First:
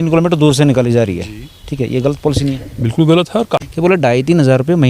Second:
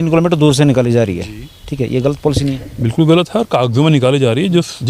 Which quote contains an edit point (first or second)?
first